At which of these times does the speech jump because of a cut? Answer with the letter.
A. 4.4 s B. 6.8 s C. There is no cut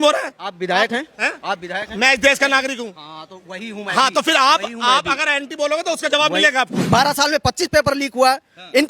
B